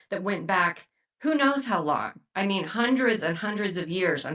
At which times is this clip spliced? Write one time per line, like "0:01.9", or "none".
none